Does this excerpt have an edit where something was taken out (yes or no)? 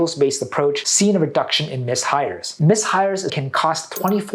yes